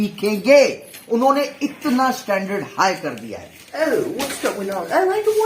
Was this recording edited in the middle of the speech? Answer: yes; 1 cut; at 3.7 s

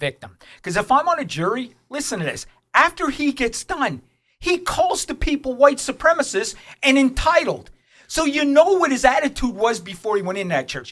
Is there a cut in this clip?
no; 0 cuts

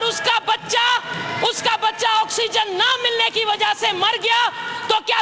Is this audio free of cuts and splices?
yes; 0 cuts

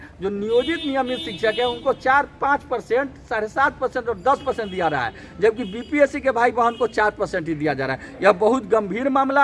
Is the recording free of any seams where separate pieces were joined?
yes; 0 cuts

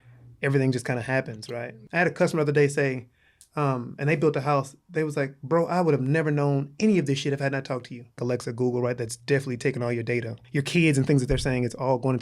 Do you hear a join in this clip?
yes; 3 cuts; at 1.7 s, 8.2 s, 10.4 s

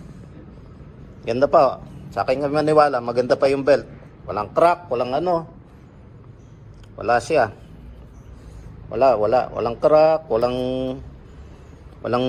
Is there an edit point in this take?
no; 0 cuts

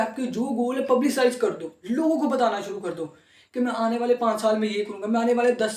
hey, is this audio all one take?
yes; 0 cuts

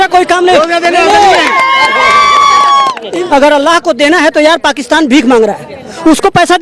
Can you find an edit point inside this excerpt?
yes; 1 cut; at 3.0 s

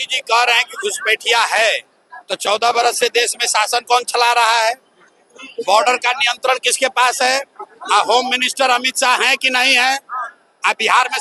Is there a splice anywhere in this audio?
no; 0 cuts

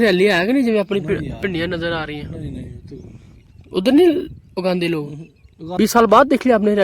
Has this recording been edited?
yes; 1 cut; at 5.6 s

